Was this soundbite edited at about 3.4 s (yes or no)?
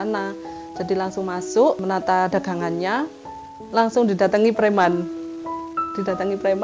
yes